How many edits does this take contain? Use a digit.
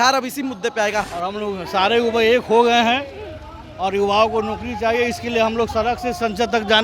1